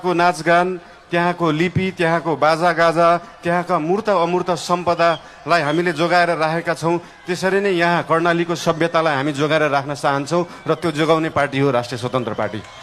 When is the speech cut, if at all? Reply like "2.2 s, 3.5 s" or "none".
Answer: none

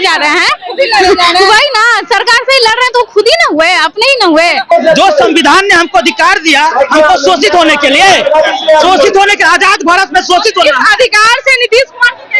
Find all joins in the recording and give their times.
4.7 s

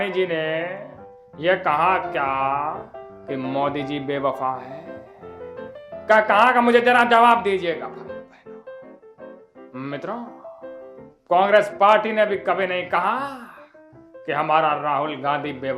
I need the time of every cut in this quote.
2.5 s

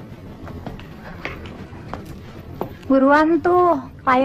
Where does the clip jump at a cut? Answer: none

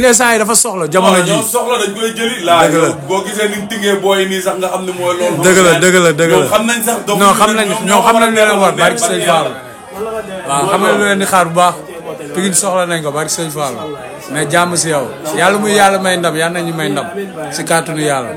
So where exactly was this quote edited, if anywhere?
none

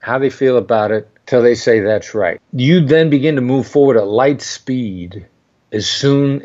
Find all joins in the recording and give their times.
1.1 s, 2.4 s

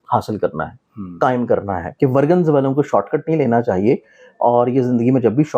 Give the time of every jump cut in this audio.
1.9 s

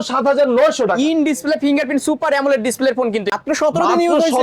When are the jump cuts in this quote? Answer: 3.3 s

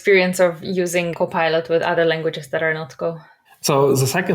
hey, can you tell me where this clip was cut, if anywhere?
1.1 s

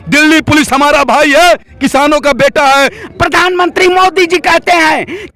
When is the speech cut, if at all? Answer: 3.0 s

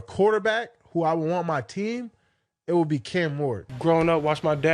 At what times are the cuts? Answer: 3.7 s

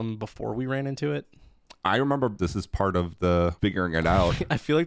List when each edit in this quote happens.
2.4 s, 3.6 s

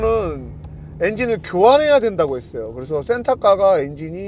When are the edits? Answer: none

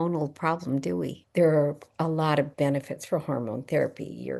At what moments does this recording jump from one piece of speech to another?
1.2 s

